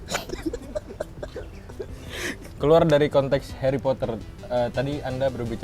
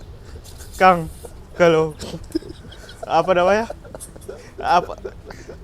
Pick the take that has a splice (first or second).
first